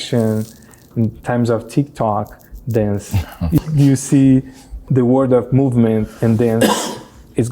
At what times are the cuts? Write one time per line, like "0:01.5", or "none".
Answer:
0:04.8